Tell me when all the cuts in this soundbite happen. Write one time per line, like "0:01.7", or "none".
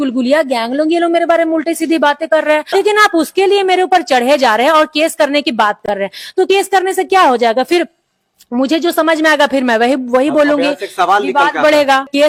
none